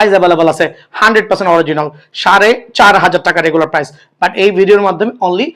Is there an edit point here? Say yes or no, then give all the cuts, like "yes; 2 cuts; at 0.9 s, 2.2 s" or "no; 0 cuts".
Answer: no; 0 cuts